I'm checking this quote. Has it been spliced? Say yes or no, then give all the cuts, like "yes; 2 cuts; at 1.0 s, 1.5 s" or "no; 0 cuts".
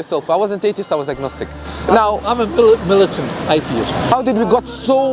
yes; 1 cut; at 4.1 s